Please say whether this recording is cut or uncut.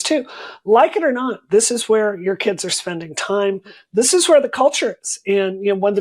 cut